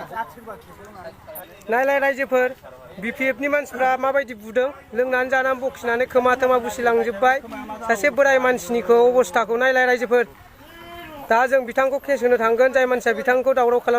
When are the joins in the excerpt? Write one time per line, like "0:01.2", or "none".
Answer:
0:01.5